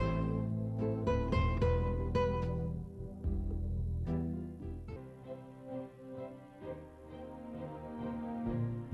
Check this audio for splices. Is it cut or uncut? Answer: cut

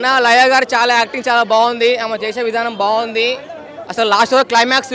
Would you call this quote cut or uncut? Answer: uncut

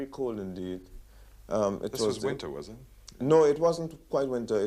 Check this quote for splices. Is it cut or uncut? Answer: cut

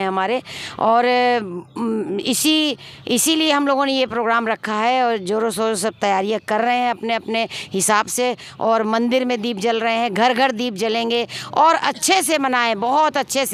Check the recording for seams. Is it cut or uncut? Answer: uncut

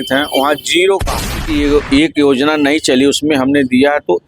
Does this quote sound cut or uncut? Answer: cut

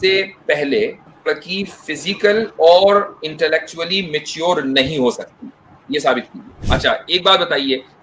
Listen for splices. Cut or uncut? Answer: cut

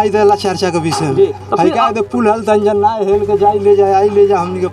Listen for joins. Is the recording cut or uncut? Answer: uncut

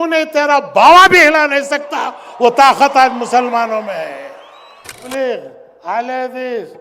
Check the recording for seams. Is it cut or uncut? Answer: cut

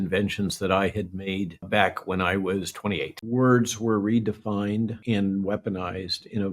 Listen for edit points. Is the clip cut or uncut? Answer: cut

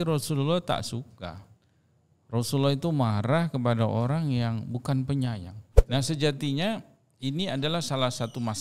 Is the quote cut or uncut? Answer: cut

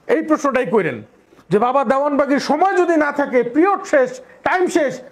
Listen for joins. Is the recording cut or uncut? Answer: uncut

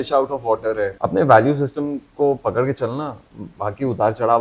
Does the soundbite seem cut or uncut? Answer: cut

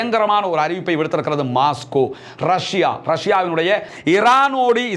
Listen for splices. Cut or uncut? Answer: cut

